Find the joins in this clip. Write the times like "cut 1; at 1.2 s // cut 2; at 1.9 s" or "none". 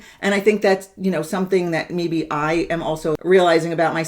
cut 1; at 3.2 s